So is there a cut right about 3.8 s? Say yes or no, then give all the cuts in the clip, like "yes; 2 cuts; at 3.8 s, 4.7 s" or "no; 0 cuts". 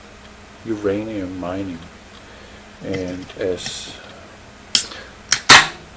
yes; 1 cut; at 3.8 s